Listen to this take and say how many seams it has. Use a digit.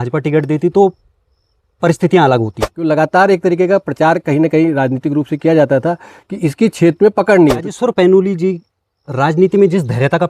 2